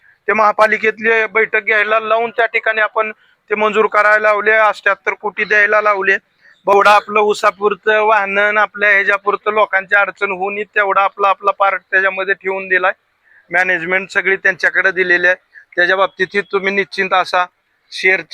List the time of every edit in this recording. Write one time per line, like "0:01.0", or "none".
0:06.7